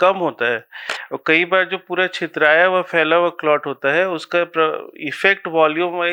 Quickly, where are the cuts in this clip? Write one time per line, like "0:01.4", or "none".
none